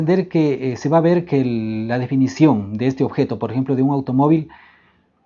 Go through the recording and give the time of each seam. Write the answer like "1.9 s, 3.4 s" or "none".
2.7 s